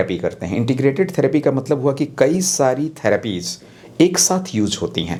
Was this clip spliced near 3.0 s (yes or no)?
no